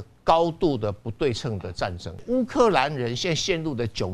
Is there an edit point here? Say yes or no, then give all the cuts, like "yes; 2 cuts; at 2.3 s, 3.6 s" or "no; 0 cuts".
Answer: yes; 1 cut; at 2.2 s